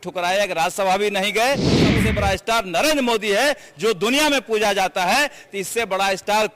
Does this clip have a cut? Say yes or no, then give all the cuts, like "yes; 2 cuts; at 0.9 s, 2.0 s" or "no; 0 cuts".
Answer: yes; 1 cut; at 2.0 s